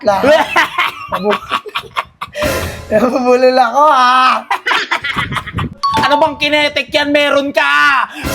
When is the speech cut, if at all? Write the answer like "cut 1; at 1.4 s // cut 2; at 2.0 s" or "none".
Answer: cut 1; at 5.8 s